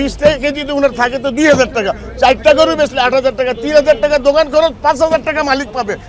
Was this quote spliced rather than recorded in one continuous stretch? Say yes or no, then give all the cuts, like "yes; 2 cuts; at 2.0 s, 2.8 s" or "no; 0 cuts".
no; 0 cuts